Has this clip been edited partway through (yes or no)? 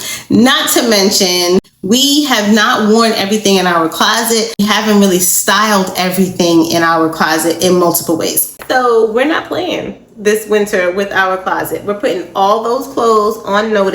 yes